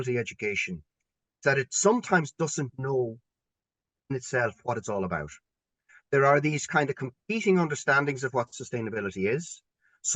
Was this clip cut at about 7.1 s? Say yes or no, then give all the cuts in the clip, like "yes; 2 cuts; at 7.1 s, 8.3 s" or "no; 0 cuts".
no; 0 cuts